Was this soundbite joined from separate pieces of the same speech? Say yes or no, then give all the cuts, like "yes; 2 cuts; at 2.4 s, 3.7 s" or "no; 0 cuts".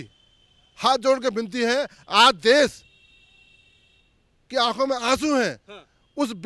no; 0 cuts